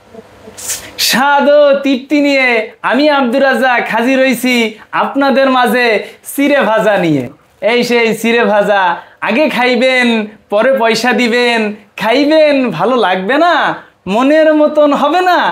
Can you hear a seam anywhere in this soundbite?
yes; 1 cut; at 7.4 s

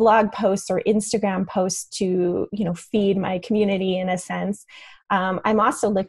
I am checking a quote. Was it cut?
no; 0 cuts

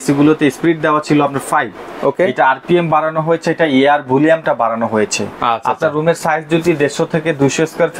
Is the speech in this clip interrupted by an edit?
no; 0 cuts

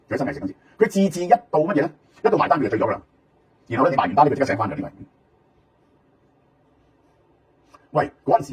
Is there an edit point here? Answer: no; 0 cuts

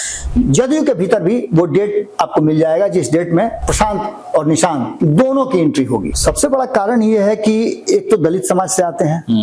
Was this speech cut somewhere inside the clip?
yes; 3 cuts; at 3.6 s, 4.9 s, 6.1 s

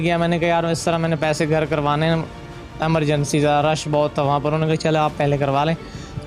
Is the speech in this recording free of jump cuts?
yes; 0 cuts

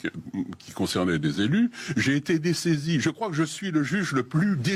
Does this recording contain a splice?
no; 0 cuts

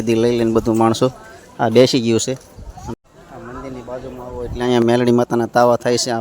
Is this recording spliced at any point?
yes; 1 cut; at 2.8 s

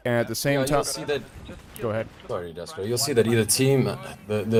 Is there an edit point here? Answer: no; 0 cuts

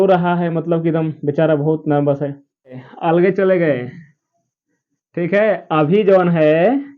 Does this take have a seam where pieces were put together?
yes; 1 cut; at 2.9 s

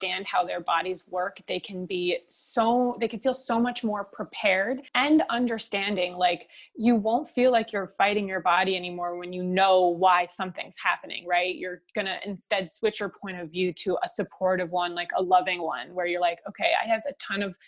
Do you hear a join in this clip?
yes; 1 cut; at 4.9 s

